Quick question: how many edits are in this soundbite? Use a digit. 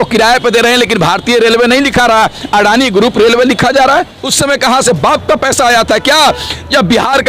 1